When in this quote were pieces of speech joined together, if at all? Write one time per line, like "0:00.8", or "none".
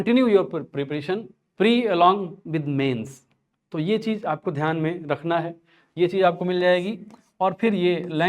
0:01.4